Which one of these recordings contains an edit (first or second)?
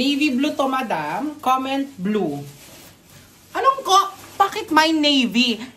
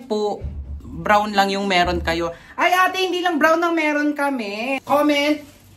second